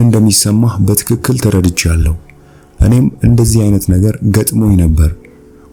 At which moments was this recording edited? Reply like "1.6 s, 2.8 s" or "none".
none